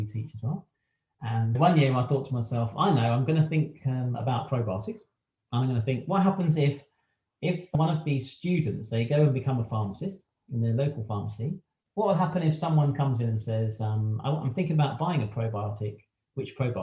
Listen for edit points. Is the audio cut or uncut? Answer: cut